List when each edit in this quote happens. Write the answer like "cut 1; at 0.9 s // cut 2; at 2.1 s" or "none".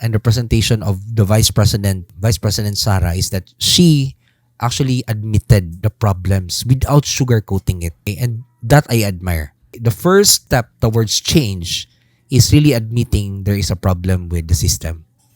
cut 1; at 2.1 s // cut 2; at 5.8 s // cut 3; at 8.0 s // cut 4; at 9.7 s // cut 5; at 10.4 s